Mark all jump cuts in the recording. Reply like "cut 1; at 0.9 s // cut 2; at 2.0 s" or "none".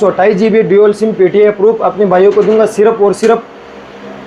none